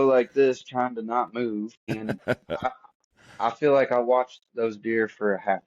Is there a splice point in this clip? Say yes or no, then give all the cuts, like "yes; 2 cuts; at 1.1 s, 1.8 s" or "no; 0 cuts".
yes; 1 cut; at 1.9 s